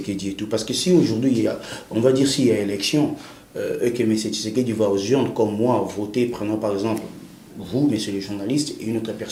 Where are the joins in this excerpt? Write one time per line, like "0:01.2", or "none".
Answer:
none